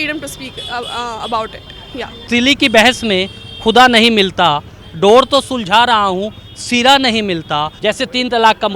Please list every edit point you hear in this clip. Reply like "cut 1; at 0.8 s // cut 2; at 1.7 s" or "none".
cut 1; at 2.3 s // cut 2; at 7.7 s